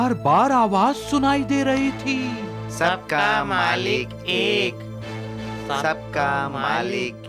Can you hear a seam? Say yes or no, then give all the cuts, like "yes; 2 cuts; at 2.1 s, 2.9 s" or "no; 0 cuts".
no; 0 cuts